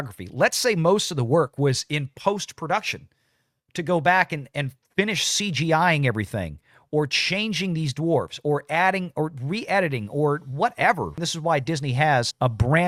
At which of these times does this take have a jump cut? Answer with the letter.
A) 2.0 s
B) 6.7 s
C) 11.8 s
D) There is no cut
D